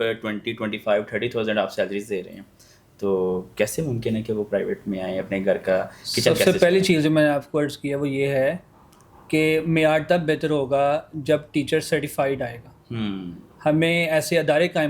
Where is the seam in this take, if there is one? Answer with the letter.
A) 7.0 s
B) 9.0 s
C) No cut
C